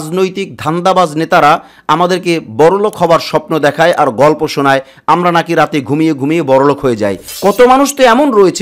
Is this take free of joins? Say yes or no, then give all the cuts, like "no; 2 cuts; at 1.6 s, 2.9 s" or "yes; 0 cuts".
no; 1 cut; at 7.3 s